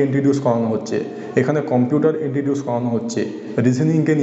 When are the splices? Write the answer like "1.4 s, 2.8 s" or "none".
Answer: none